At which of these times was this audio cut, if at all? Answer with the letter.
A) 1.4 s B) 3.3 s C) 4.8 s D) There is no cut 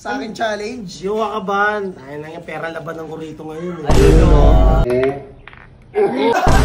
C